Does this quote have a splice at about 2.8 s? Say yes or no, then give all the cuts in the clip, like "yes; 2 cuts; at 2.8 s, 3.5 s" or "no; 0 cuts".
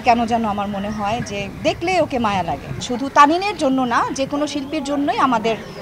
yes; 1 cut; at 2.8 s